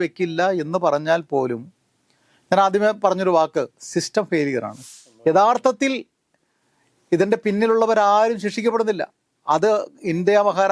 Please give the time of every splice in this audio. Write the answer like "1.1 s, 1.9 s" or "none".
4.7 s

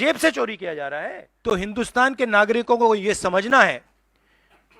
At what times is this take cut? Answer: 1.5 s

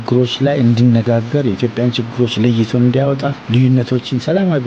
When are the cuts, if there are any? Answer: 3.4 s

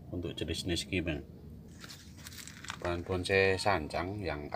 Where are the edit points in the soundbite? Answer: 1.7 s

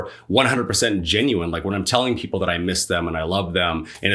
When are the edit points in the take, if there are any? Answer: none

